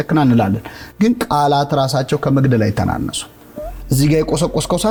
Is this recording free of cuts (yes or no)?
yes